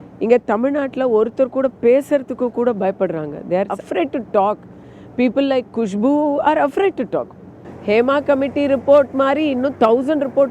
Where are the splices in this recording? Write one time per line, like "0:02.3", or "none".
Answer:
0:03.8